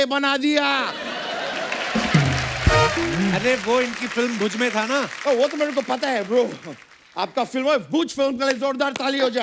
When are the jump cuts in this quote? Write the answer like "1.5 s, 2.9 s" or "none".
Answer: none

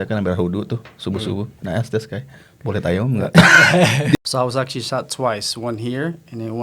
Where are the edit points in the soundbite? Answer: 4.1 s

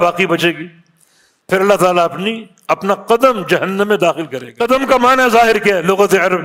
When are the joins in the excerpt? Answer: 4.5 s

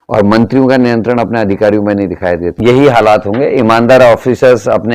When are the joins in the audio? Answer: 2.5 s

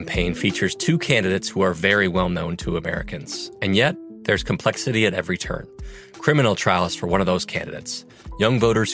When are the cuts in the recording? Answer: none

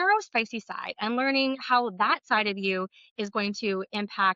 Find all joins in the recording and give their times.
none

